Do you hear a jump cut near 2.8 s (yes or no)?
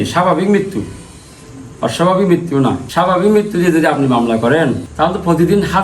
yes